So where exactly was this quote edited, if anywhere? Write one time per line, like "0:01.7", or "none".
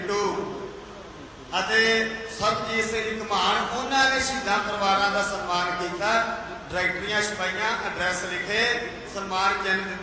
0:05.6

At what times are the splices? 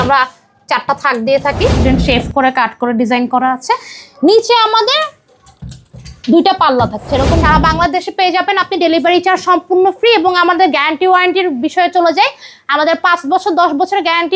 0:01.8
0:07.4

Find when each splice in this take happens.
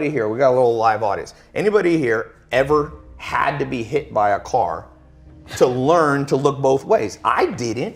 none

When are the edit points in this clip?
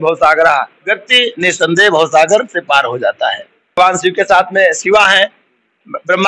0:03.8

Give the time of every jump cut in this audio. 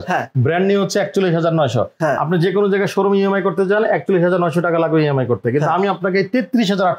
none

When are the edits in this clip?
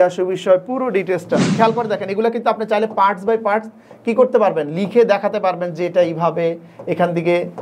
0:01.5

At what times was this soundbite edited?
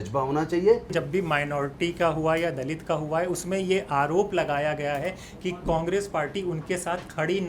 0:00.9

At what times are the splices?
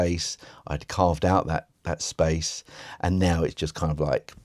none

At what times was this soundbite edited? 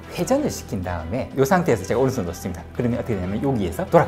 none

